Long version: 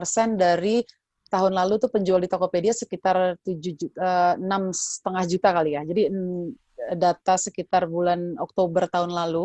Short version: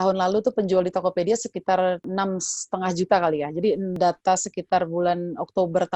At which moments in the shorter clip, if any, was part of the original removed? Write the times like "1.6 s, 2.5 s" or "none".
2.1 s, 4.0 s